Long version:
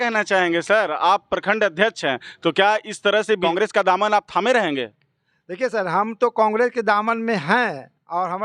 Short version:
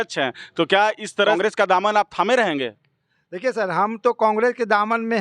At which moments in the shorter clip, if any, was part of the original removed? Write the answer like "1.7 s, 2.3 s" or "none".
1.3 s